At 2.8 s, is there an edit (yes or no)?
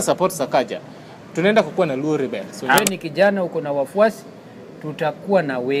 yes